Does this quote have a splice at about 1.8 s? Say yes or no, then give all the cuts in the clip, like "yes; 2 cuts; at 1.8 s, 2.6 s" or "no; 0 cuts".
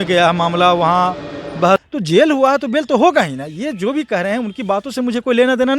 yes; 1 cut; at 1.8 s